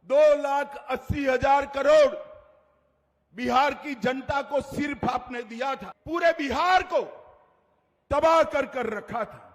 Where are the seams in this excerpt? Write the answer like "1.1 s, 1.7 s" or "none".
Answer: 5.9 s